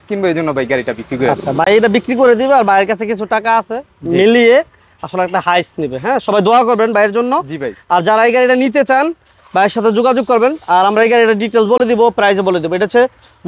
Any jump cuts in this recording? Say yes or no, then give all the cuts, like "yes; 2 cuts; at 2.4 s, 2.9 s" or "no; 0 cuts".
no; 0 cuts